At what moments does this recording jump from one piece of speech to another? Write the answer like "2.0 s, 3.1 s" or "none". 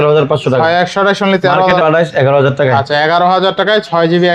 1.7 s